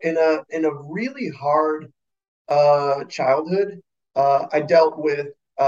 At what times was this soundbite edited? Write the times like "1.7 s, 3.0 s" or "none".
none